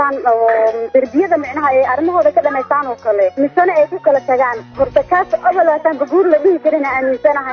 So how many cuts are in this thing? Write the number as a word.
two